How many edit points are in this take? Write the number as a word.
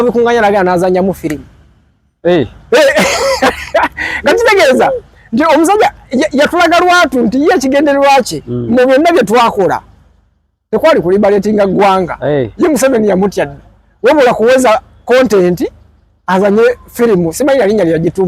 zero